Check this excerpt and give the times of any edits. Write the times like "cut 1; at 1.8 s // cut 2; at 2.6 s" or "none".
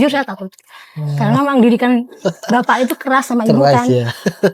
none